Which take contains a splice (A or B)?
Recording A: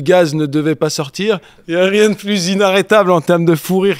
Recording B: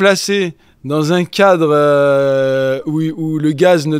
A